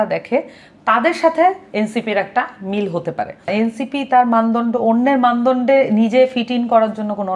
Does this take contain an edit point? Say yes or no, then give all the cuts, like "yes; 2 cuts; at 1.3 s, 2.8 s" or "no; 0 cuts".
yes; 1 cut; at 3.5 s